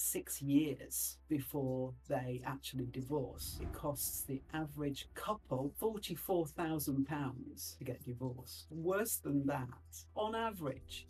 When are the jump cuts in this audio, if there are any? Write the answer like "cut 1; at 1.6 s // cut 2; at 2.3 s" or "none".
cut 1; at 3.5 s // cut 2; at 8.6 s // cut 3; at 10.1 s

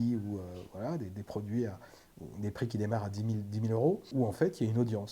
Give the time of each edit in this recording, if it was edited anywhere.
cut 1; at 4.0 s

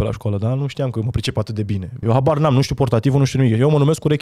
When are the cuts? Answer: cut 1; at 2.0 s

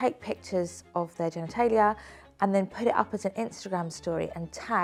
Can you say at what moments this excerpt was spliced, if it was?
none

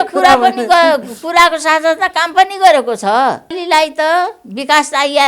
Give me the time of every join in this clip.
cut 1; at 3.6 s

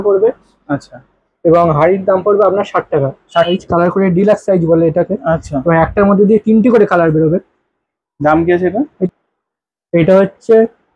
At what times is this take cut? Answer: cut 1; at 3.5 s // cut 2; at 9.1 s

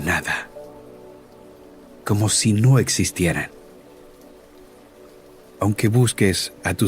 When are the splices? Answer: cut 1; at 4.0 s // cut 2; at 5.6 s

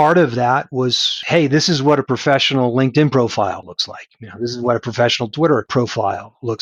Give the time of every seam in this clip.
cut 1; at 1.1 s // cut 2; at 3.6 s // cut 3; at 5.7 s

